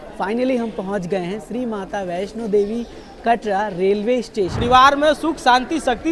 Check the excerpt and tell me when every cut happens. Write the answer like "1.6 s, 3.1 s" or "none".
4.6 s